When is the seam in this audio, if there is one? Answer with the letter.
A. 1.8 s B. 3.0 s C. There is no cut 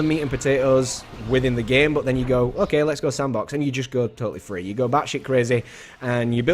A